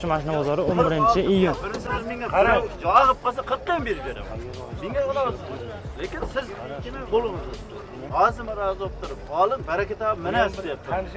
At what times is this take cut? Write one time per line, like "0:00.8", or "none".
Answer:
0:01.8
0:07.9

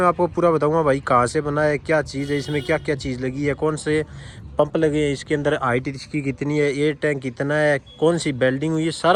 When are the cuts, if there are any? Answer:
none

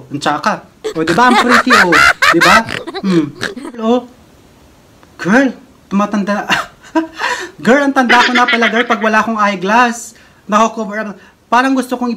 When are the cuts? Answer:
0:03.8

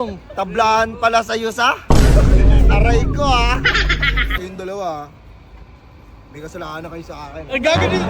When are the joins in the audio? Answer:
0:04.4

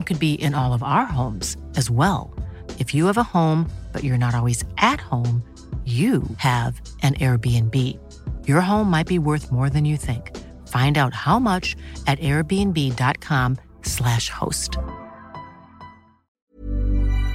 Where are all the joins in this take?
0:16.3

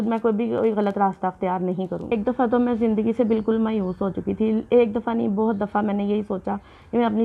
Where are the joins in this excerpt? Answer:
0:02.0

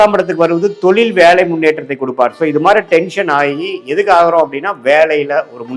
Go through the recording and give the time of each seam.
none

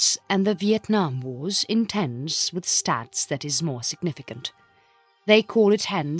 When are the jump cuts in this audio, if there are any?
0:02.5

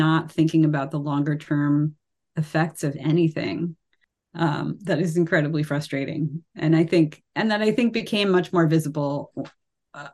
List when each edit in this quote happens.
none

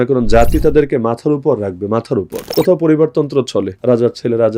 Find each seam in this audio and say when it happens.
0:02.4
0:03.7

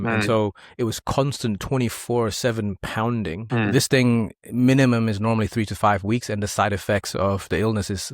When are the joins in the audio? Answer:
0:03.4

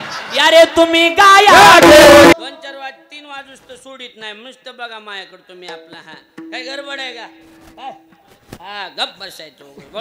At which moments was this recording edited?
0:02.3

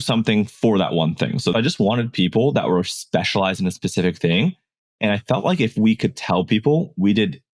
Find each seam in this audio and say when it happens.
0:01.5

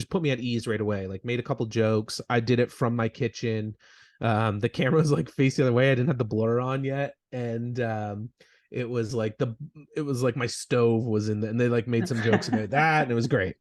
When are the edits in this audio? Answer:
none

